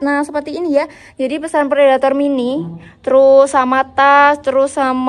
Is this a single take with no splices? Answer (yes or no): yes